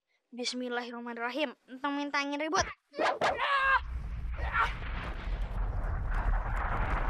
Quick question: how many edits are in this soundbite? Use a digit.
1